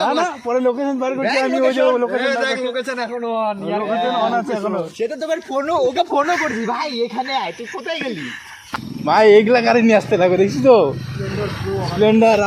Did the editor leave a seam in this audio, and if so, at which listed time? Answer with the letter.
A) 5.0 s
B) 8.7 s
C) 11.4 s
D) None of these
B